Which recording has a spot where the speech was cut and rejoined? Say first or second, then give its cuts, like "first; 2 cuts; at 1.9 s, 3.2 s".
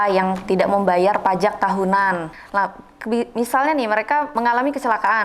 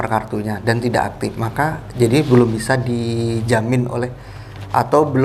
first; 2 cuts; at 2.3 s, 4.3 s